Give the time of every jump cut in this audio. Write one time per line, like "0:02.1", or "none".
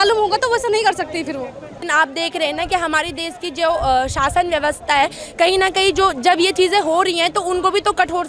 0:01.7